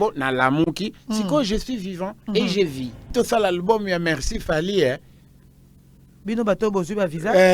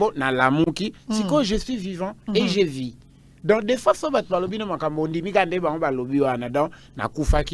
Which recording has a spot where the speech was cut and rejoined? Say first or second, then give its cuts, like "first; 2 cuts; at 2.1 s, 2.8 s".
first; 1 cut; at 3.0 s